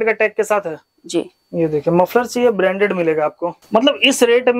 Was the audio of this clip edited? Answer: yes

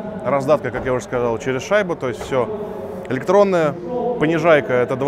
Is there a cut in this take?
no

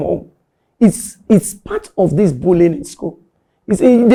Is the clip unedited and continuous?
yes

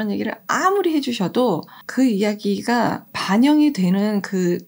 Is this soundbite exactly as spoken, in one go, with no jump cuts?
no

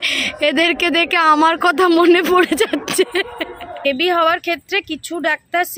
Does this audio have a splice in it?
yes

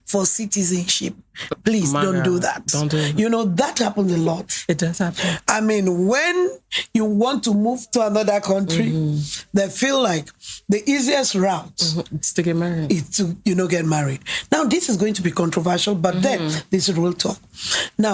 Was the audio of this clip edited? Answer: no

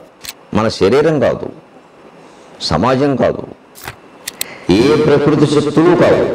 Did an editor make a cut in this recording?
no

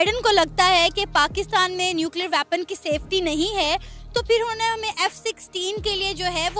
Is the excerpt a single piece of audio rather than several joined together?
yes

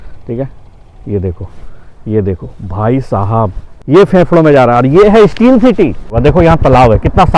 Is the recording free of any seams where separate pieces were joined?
no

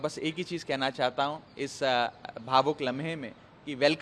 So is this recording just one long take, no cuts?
yes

